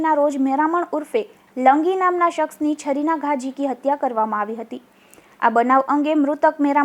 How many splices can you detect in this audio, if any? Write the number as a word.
zero